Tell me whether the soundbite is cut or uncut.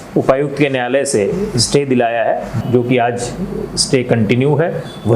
cut